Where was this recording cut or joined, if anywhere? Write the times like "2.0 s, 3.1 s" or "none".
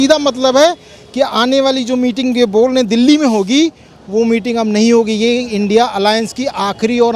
none